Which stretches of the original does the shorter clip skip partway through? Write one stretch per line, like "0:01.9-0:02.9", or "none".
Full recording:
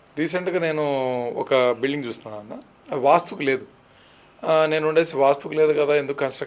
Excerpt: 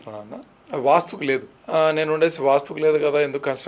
0:03.7-0:04.3